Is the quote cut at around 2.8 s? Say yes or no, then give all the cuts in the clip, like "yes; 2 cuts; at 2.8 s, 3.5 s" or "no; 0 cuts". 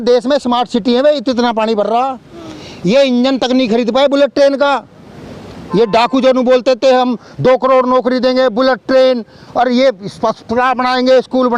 no; 0 cuts